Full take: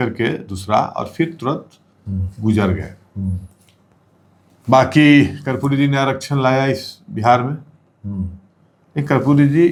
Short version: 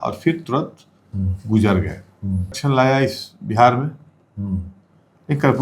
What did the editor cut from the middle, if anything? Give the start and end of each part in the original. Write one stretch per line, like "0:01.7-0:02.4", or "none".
0:03.5-0:06.2